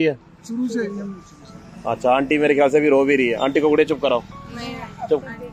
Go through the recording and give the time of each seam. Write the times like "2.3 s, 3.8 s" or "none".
4.3 s